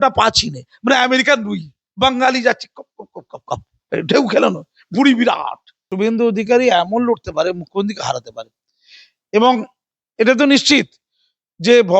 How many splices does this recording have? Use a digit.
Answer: 1